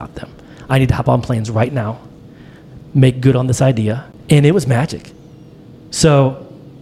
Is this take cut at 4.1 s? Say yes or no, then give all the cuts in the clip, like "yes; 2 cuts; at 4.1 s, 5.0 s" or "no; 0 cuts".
yes; 1 cut; at 4.1 s